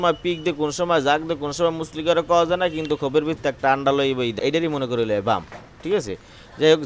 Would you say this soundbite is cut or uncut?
cut